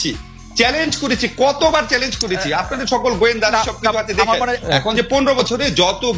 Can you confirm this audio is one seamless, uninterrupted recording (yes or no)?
no